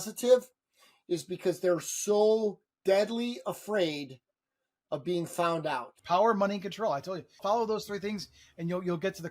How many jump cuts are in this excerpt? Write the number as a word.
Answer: two